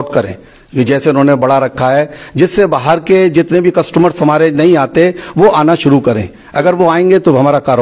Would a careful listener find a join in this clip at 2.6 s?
no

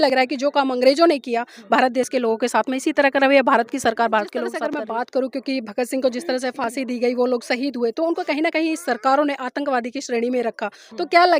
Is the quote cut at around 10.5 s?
no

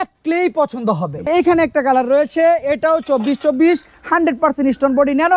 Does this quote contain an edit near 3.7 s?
no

